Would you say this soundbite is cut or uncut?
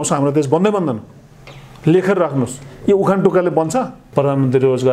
cut